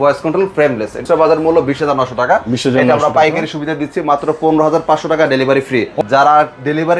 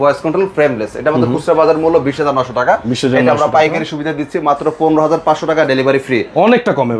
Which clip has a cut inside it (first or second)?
first